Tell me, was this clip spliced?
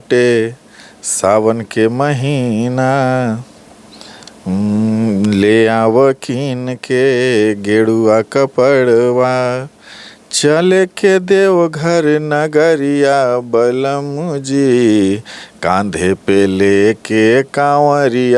no; 0 cuts

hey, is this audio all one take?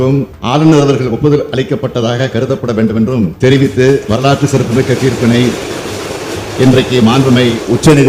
yes; 0 cuts

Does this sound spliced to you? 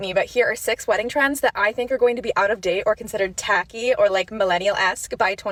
no; 0 cuts

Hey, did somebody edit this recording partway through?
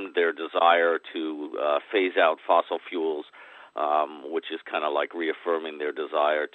no; 0 cuts

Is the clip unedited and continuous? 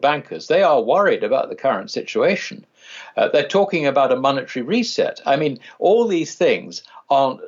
yes; 0 cuts

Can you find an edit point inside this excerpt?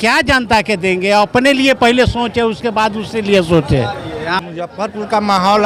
no; 0 cuts

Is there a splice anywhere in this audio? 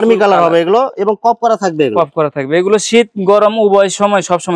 no; 0 cuts

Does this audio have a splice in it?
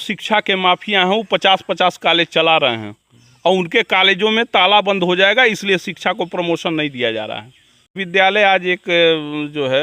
yes; 1 cut; at 8.0 s

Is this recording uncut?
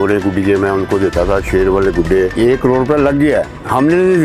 no; 1 cut; at 2.3 s

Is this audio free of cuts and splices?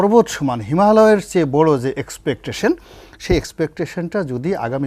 yes; 0 cuts

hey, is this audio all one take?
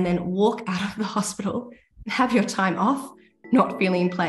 yes; 0 cuts

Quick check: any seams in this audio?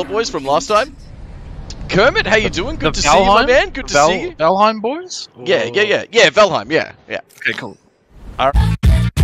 no; 0 cuts

